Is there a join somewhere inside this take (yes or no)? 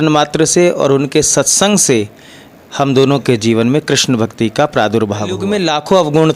yes